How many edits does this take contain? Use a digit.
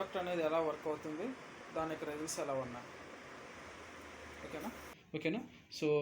1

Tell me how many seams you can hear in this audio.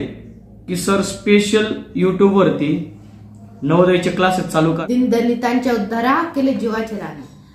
1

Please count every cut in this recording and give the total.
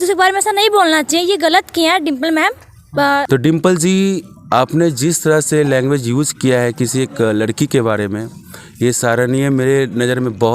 1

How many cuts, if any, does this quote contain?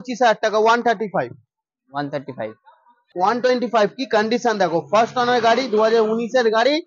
1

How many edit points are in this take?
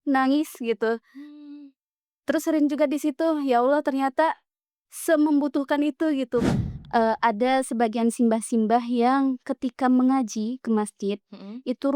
1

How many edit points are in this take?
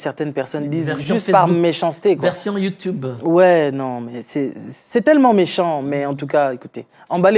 0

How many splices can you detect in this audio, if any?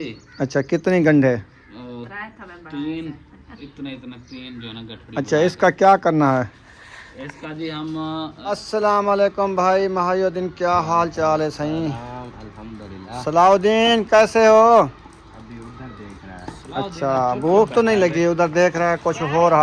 2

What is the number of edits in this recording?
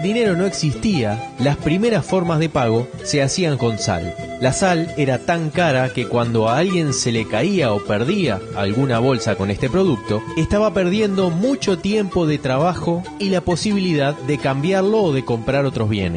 0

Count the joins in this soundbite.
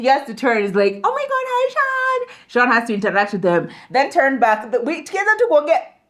0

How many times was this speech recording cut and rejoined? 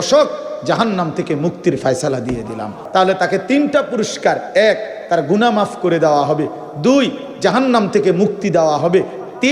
1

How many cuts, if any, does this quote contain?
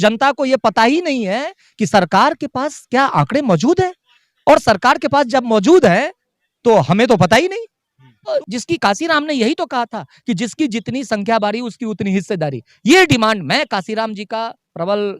1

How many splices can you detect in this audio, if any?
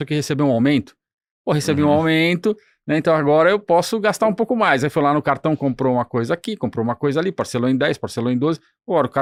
0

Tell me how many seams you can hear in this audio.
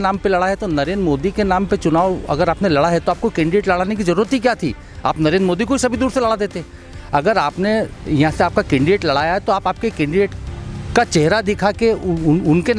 0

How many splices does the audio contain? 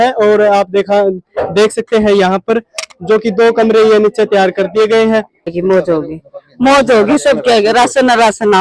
1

